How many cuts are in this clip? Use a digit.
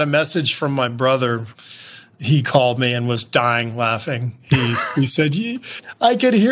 1